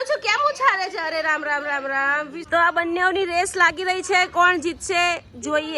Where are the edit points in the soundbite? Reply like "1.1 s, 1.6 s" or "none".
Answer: 2.4 s